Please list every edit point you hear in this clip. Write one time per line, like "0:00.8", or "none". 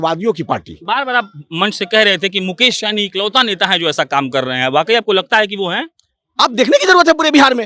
none